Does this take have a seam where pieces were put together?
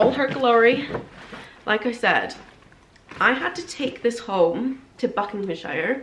no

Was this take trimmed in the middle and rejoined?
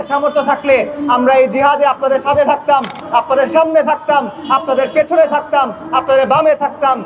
no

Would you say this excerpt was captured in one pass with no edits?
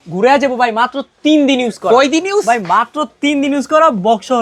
yes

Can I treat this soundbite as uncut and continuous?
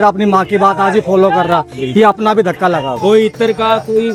yes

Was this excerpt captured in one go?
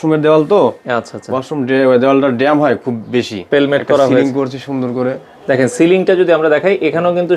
no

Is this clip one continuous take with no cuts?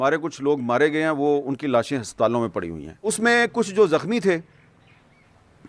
no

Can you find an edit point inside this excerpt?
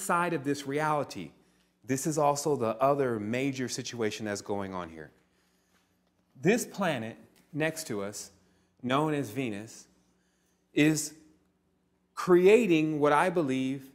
yes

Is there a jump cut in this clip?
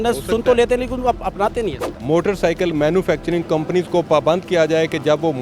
yes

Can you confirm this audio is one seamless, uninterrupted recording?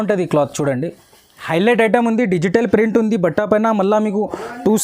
no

